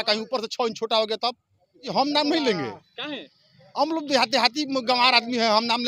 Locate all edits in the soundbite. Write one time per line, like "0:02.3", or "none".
0:01.9